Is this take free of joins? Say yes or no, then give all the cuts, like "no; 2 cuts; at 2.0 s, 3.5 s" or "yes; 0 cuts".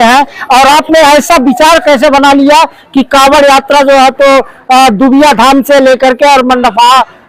yes; 0 cuts